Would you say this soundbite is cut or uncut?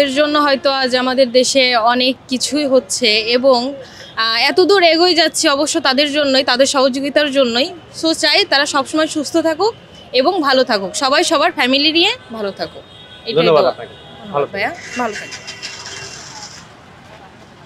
uncut